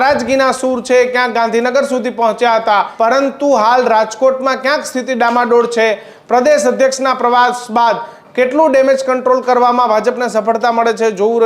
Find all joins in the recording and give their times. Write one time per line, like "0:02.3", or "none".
0:02.9